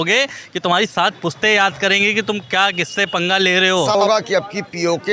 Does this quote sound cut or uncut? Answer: cut